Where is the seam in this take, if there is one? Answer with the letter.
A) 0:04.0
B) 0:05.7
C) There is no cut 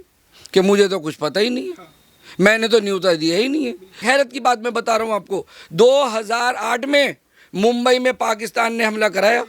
A